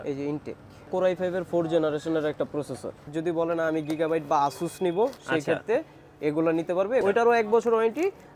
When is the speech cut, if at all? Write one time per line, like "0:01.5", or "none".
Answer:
0:00.9
0:03.1
0:07.0